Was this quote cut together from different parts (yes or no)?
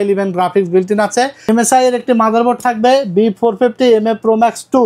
yes